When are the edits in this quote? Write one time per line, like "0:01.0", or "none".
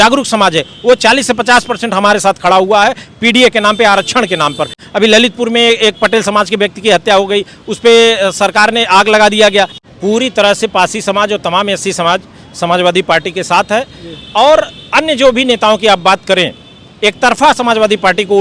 0:04.8
0:09.8